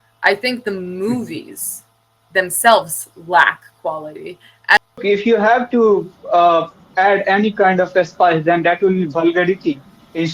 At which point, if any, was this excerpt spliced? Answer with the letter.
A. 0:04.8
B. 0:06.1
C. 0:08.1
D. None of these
A